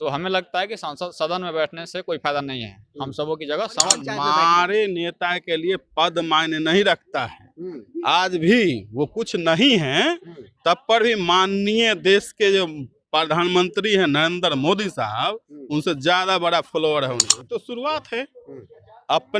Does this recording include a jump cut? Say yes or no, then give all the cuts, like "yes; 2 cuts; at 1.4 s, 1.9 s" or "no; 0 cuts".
yes; 2 cuts; at 4.0 s, 17.3 s